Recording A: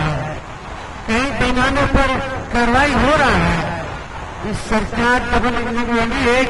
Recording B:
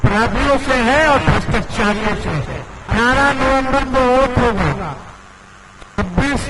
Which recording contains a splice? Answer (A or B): B